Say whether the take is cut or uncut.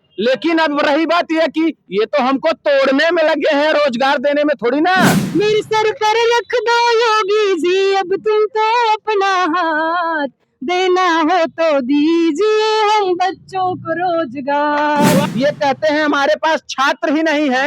cut